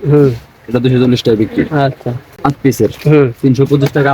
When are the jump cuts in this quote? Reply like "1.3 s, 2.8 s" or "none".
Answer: 2.3 s